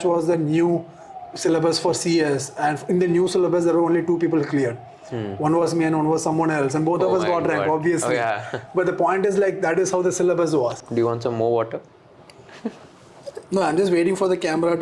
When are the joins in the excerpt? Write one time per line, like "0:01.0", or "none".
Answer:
0:10.8